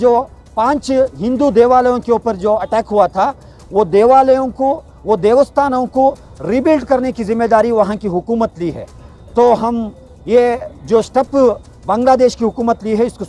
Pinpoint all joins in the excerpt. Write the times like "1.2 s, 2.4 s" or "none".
none